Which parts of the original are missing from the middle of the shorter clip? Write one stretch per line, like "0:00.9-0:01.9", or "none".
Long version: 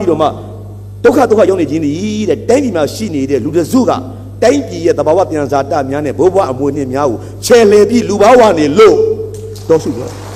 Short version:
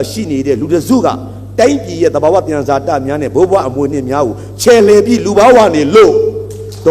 none